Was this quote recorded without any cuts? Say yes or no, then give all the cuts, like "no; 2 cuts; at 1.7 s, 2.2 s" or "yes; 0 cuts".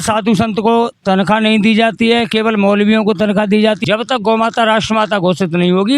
no; 1 cut; at 3.8 s